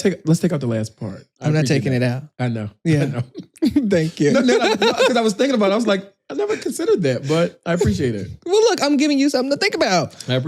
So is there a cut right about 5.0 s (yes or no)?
no